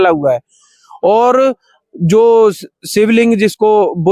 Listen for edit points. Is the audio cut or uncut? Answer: uncut